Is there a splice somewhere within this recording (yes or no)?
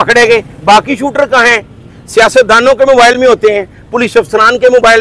no